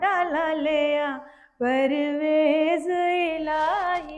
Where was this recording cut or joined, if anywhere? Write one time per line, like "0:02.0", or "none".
none